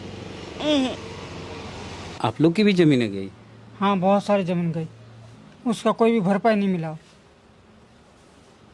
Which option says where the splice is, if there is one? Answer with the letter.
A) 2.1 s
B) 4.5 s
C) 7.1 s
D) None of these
A